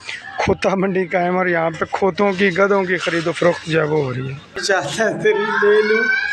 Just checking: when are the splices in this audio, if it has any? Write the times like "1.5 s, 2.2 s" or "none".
4.5 s